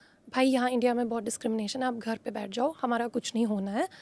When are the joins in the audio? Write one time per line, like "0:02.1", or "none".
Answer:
none